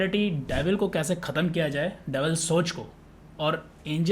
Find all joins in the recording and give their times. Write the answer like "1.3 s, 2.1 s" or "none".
none